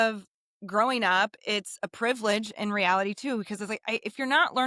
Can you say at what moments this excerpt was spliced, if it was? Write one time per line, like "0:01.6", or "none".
none